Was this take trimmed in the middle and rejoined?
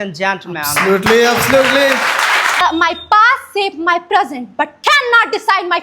yes; 1 cut; at 2.6 s

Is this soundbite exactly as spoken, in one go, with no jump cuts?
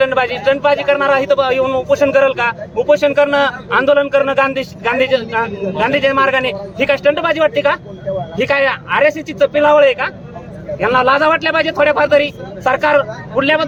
yes; 0 cuts

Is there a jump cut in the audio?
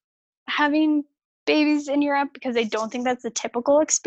no; 0 cuts

